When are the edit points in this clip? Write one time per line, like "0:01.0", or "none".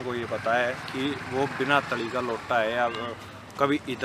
none